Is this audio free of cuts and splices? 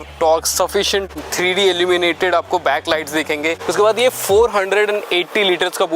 no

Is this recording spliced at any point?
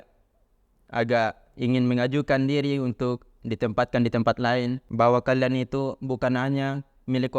yes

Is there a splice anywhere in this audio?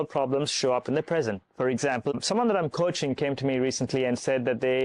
no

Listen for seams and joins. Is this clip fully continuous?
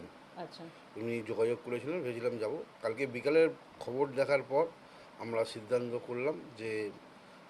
yes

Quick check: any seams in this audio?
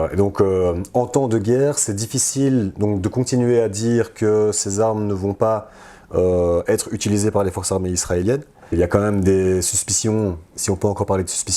yes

